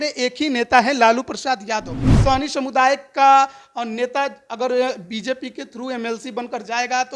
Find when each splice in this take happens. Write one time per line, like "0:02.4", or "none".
0:02.1